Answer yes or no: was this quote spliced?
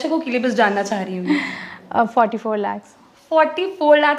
no